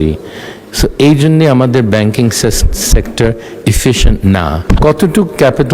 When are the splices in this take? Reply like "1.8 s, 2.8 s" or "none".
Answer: 4.6 s